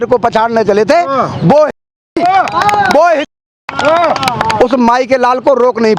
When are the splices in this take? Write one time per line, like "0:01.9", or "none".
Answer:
none